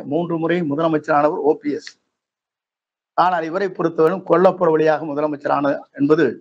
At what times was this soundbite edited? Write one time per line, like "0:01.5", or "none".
none